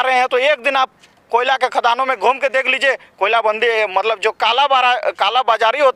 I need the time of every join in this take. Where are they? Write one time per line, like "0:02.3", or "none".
none